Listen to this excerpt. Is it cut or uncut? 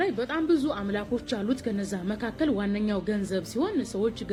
uncut